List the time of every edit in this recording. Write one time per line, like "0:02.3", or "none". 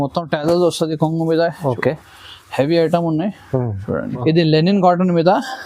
0:04.1

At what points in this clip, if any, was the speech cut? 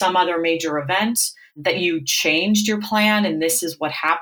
none

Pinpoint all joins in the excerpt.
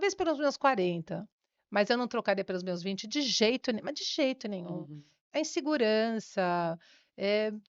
none

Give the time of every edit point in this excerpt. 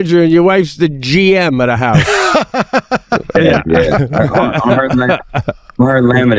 none

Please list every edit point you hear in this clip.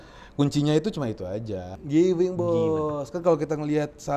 0:01.7

